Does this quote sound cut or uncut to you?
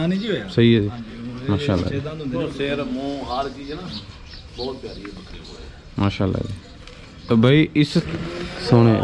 cut